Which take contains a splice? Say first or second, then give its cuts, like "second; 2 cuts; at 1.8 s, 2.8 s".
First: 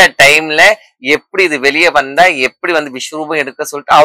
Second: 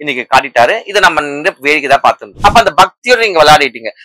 second; 1 cut; at 2.3 s